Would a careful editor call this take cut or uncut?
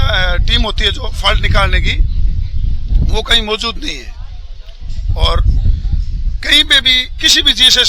uncut